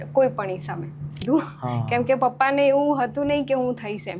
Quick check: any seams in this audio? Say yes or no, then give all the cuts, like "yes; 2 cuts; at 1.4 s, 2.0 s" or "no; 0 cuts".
yes; 1 cut; at 1.2 s